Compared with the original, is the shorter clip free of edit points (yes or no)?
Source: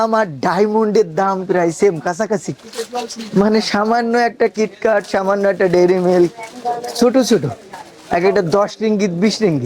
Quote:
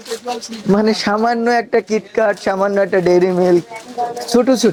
yes